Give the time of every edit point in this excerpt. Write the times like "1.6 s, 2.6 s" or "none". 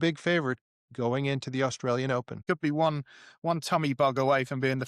2.4 s